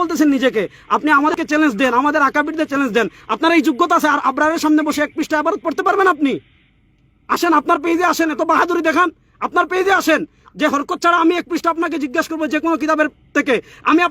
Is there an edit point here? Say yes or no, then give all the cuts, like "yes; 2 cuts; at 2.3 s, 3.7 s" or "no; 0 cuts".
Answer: yes; 1 cut; at 1.3 s